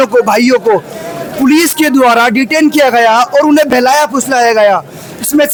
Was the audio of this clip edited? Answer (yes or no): no